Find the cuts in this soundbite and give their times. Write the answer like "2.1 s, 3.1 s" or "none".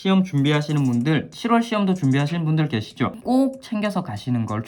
3.2 s